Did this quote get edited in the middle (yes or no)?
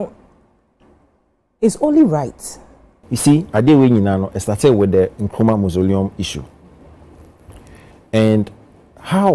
yes